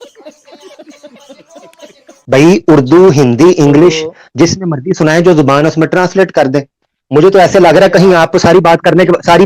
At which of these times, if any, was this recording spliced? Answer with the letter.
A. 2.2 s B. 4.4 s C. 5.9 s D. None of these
A